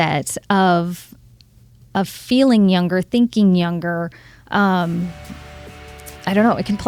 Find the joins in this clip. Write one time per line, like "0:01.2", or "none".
none